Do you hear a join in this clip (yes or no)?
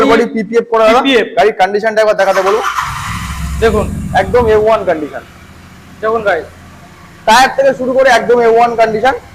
no